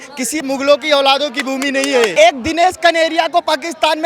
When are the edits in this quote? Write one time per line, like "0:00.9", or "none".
0:02.1